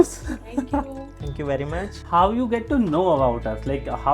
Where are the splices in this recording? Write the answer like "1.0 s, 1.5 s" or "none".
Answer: 2.0 s